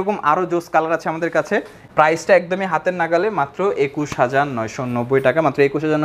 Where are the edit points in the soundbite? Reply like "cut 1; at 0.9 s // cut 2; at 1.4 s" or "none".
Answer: cut 1; at 1.8 s

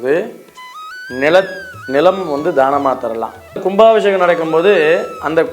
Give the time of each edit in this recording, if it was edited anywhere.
cut 1; at 3.6 s

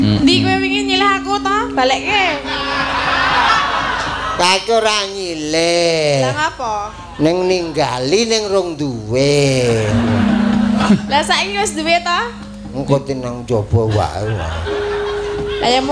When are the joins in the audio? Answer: none

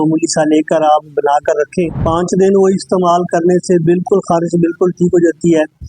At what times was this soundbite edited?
cut 1; at 2.0 s

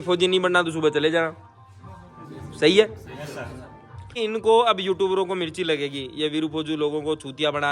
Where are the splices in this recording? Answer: cut 1; at 4.2 s

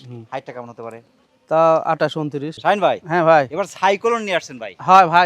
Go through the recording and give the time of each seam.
cut 1; at 2.5 s

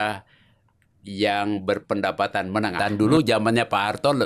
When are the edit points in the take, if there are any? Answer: cut 1; at 2.8 s

